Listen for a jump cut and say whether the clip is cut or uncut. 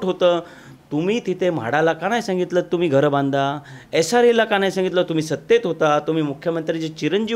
uncut